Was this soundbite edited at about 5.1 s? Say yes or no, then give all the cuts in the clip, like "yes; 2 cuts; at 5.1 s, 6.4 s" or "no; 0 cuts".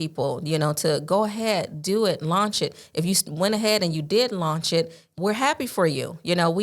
yes; 1 cut; at 5.1 s